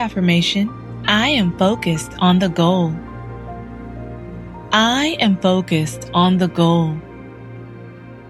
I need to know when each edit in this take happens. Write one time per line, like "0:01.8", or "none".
0:03.0
0:04.3